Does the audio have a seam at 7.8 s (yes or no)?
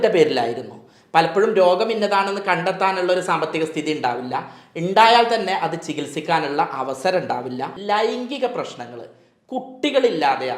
yes